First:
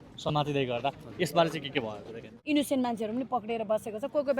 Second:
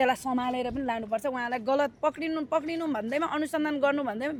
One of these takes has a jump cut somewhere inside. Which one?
first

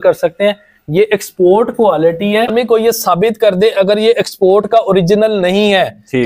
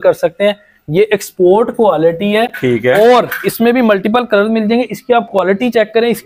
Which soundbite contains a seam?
first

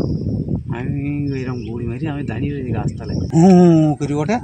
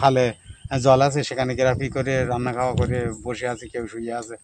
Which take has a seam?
first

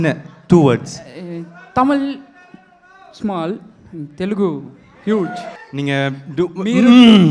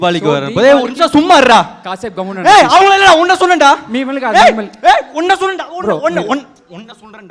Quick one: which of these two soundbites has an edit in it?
first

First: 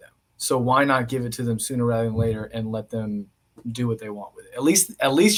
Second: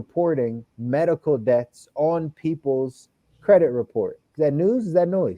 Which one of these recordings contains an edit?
second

